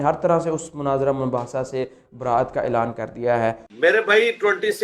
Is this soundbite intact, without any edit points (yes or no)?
yes